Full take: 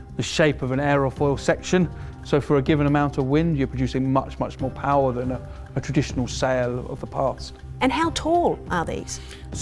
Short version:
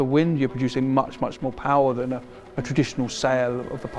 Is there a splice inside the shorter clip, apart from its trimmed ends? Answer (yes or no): no